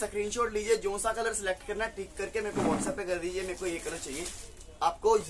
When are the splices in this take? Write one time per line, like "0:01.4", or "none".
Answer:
none